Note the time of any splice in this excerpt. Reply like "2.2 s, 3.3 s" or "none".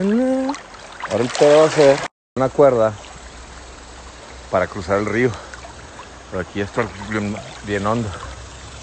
2.2 s